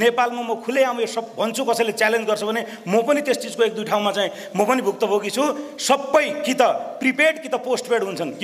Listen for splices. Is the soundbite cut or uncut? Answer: uncut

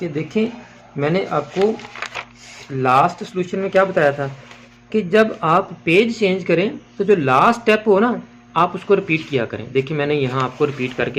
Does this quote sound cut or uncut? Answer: uncut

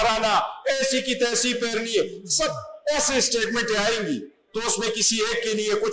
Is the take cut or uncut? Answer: uncut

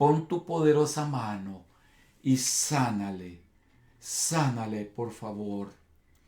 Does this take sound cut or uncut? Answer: uncut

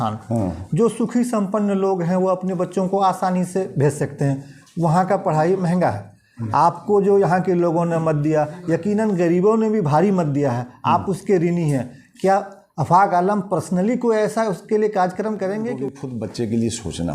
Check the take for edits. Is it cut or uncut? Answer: cut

